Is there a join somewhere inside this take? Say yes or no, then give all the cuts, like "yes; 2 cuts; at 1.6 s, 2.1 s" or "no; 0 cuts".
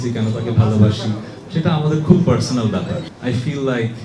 yes; 1 cut; at 3.1 s